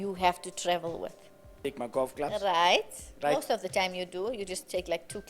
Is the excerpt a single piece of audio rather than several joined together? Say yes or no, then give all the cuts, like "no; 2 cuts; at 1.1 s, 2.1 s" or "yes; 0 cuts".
no; 1 cut; at 1.5 s